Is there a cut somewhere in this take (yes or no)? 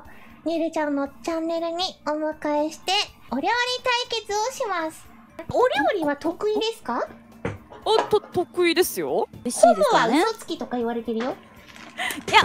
yes